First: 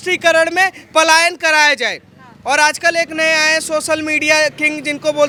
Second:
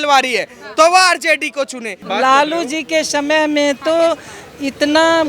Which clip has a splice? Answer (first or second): second